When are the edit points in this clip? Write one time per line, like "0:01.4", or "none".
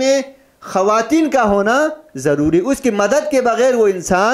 none